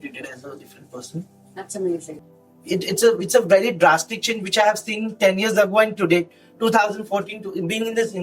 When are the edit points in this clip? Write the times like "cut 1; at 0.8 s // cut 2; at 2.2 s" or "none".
cut 1; at 2.2 s